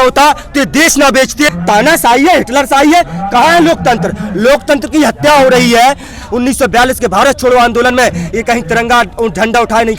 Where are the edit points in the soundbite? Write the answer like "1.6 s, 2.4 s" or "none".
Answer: 1.5 s, 6.2 s